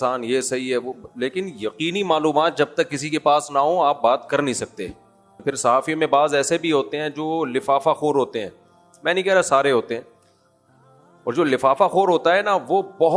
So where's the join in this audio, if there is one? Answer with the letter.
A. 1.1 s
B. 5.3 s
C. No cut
B